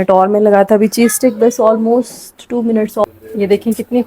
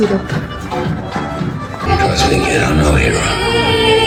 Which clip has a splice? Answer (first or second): first